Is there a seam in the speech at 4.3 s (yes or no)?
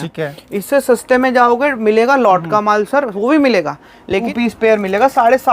yes